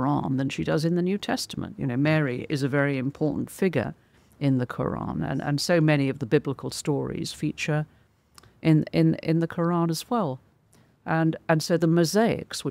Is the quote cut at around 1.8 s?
no; 0 cuts

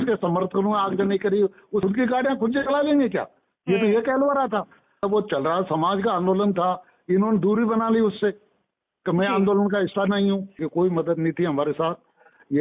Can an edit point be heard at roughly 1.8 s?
yes; 3 cuts; at 1.8 s, 5.0 s, 10.6 s

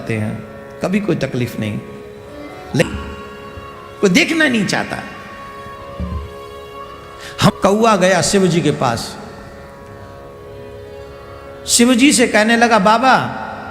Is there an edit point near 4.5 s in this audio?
no; 2 cuts; at 2.8 s, 7.5 s

